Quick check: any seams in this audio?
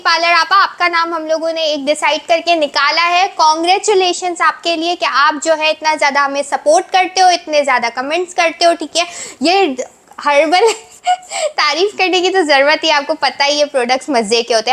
no; 0 cuts

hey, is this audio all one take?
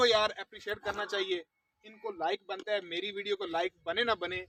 yes; 0 cuts

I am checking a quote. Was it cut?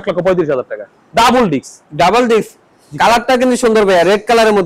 no; 0 cuts

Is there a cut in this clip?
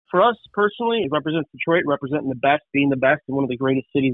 yes; 1 cut; at 1.0 s

